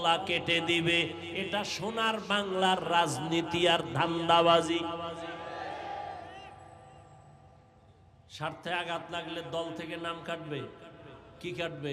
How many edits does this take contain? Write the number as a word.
zero